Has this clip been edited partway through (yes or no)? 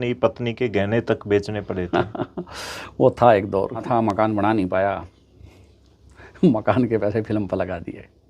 yes